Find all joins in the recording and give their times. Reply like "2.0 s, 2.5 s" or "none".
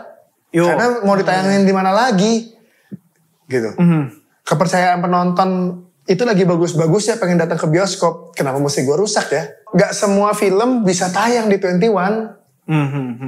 9.6 s